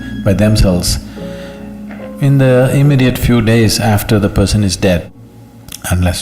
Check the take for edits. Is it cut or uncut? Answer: cut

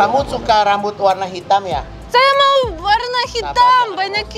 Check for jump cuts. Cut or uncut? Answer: uncut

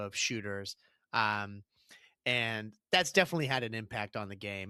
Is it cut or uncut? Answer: uncut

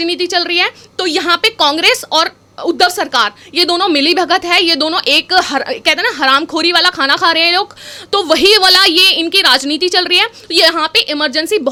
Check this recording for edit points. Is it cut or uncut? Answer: uncut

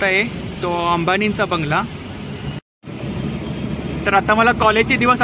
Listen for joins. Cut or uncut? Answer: cut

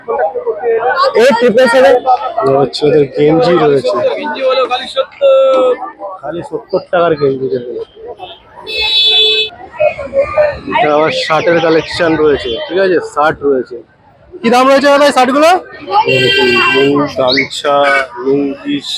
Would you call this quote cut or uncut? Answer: cut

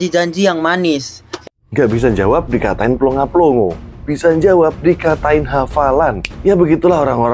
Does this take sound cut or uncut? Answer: cut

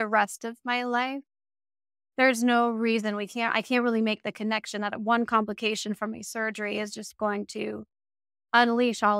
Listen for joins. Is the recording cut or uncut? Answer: uncut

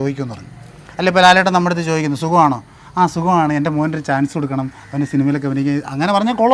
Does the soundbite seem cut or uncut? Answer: uncut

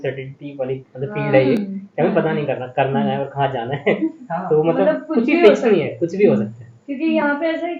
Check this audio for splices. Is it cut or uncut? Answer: uncut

